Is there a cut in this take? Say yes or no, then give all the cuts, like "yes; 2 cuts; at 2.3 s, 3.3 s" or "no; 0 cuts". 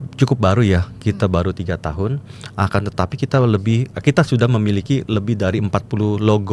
no; 0 cuts